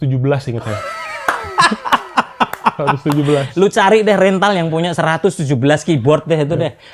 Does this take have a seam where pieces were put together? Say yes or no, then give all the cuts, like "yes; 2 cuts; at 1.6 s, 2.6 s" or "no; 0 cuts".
no; 0 cuts